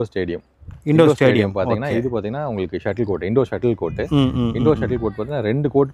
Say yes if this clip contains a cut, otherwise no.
no